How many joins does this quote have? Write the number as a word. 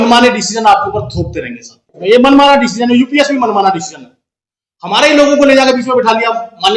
one